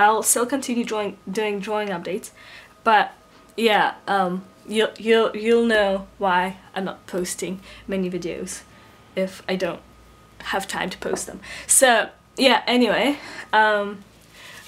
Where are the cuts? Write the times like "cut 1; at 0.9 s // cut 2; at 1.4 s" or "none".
none